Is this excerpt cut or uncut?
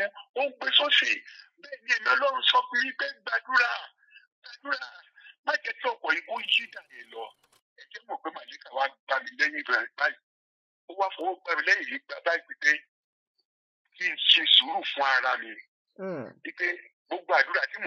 cut